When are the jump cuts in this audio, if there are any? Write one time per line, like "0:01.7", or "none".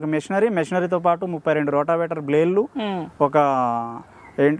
none